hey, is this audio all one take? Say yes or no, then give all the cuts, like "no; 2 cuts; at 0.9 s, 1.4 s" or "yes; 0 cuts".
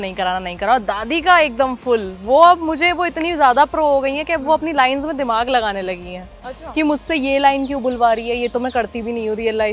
yes; 0 cuts